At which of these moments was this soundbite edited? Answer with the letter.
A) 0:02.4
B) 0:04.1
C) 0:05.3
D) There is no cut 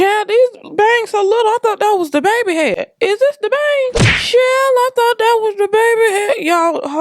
D